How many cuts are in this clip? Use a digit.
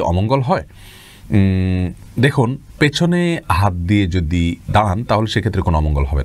0